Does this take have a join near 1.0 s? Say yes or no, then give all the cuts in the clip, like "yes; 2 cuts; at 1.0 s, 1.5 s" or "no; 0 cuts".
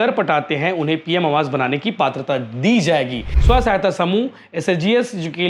no; 1 cut; at 3.3 s